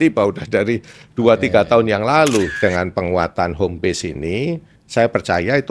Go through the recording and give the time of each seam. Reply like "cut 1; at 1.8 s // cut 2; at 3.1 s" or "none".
cut 1; at 2.5 s